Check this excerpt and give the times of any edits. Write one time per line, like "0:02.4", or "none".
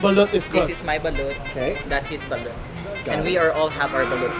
none